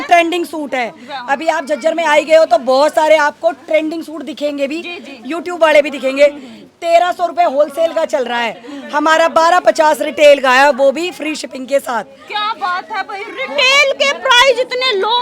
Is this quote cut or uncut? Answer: uncut